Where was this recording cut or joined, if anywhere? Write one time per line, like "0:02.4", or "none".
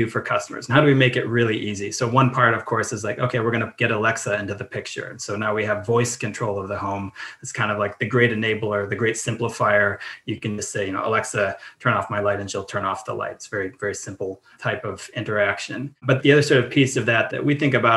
none